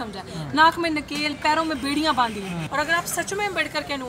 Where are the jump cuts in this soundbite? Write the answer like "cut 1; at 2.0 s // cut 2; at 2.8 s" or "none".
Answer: cut 1; at 2.6 s